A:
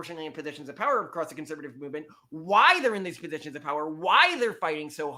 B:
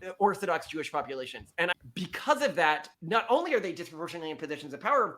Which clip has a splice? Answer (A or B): B